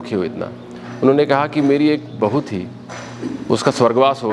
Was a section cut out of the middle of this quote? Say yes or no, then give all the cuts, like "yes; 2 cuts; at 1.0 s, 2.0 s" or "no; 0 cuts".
no; 0 cuts